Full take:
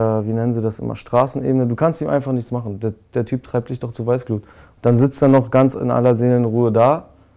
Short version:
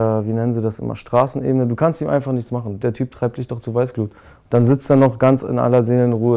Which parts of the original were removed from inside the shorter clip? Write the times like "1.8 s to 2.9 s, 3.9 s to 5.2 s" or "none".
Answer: 2.7 s to 3.0 s